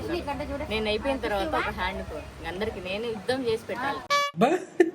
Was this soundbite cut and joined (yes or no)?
yes